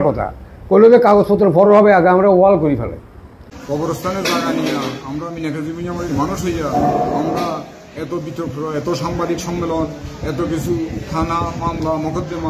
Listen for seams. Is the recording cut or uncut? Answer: cut